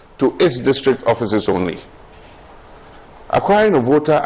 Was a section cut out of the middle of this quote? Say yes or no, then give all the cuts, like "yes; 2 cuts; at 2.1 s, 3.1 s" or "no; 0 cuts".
no; 0 cuts